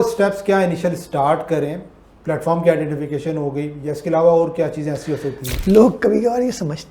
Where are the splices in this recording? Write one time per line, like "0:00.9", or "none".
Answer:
0:05.5